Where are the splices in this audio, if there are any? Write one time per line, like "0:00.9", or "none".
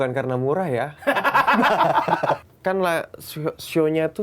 0:02.5